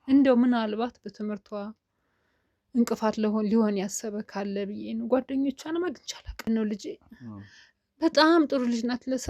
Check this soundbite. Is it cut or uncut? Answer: cut